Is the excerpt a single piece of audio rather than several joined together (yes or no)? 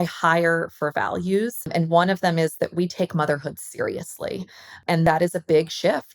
no